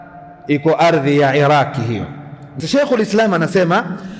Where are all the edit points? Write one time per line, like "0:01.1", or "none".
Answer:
0:02.5